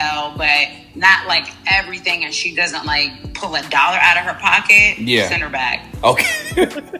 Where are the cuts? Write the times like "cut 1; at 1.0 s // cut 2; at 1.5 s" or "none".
none